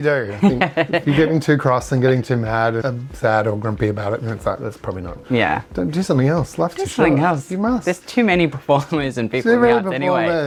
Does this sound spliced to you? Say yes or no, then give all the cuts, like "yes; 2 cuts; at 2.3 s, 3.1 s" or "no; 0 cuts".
no; 0 cuts